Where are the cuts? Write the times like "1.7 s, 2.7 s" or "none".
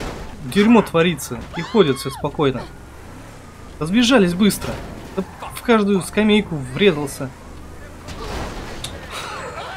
none